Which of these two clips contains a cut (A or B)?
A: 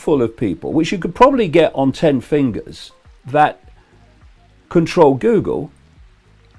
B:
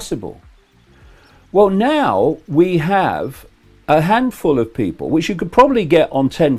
A